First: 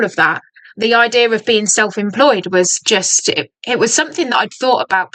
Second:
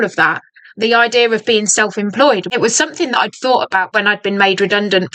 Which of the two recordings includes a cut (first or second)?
second